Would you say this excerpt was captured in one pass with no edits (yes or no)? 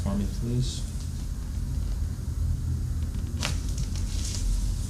no